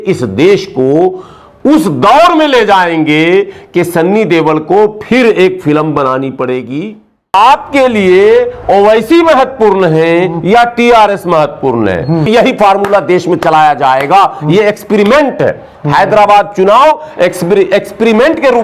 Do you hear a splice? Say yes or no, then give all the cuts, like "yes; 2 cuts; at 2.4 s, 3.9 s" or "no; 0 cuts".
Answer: yes; 2 cuts; at 7.3 s, 12.3 s